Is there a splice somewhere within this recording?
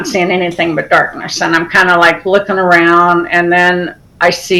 no; 0 cuts

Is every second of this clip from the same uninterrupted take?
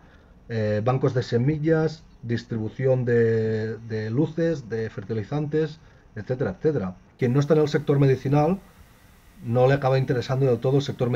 no; 1 cut; at 7.0 s

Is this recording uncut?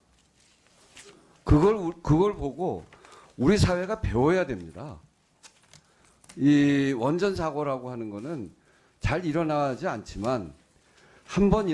yes; 0 cuts

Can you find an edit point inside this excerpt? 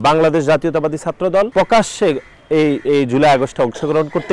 yes; 1 cut; at 1.5 s

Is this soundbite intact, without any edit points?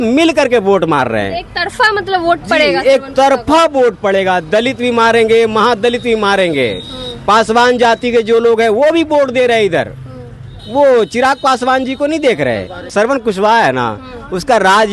no; 1 cut; at 12.9 s

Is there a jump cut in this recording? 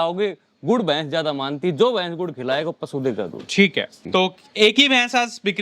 yes; 1 cut; at 4.0 s

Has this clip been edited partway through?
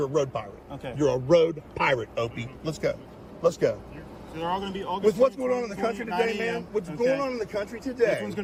no; 0 cuts

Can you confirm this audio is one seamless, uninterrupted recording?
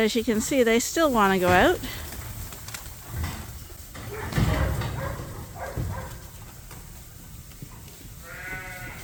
yes; 0 cuts

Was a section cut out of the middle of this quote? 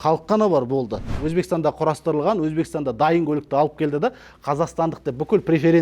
yes; 1 cut; at 1.2 s

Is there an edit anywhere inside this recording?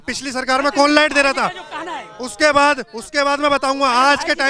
no; 0 cuts

